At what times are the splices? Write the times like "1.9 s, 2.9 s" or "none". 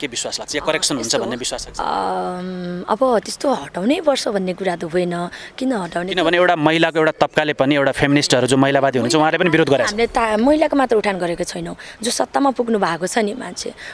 none